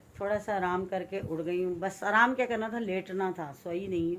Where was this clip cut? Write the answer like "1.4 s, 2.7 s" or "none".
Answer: none